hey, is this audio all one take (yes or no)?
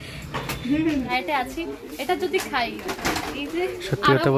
no